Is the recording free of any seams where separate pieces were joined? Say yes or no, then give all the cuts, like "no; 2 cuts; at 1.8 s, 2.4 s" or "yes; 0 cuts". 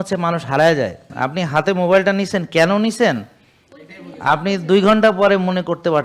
no; 1 cut; at 1.1 s